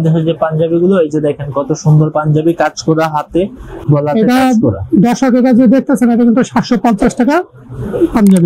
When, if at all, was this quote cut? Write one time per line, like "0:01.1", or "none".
none